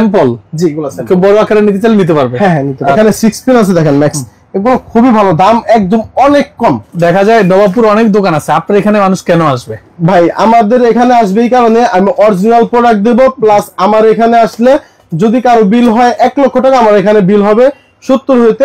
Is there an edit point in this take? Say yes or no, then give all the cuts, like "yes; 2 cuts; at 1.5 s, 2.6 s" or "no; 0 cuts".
yes; 2 cuts; at 2.9 s, 6.9 s